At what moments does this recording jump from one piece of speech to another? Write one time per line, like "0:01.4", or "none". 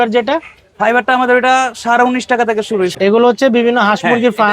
0:02.9